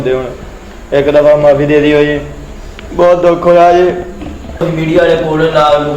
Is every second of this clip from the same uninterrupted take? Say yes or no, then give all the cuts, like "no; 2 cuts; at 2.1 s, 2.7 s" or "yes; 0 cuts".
no; 1 cut; at 4.6 s